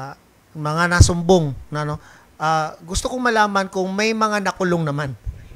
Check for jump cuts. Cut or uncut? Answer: uncut